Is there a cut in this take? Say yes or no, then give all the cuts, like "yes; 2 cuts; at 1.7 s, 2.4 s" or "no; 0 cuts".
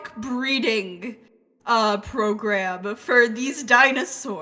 no; 0 cuts